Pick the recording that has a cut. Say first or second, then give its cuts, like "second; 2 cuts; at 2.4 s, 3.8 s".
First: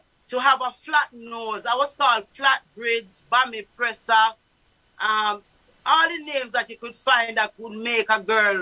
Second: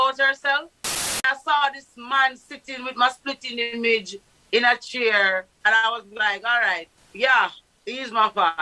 second; 3 cuts; at 1.1 s, 5.5 s, 7.0 s